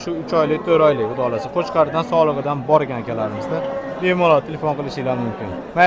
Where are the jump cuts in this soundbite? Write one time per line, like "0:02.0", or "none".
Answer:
none